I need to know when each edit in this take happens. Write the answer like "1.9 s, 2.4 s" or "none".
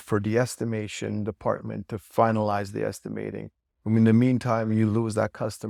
none